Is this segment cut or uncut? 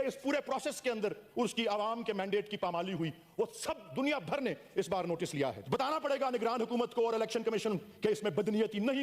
cut